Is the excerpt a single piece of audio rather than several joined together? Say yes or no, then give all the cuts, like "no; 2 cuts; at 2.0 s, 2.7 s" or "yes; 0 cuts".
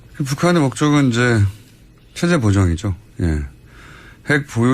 no; 1 cut; at 3.6 s